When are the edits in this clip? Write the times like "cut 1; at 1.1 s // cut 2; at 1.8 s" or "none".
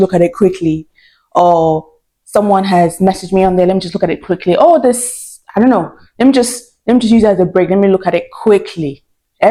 none